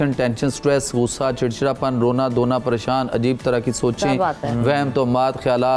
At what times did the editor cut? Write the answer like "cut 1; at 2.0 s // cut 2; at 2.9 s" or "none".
none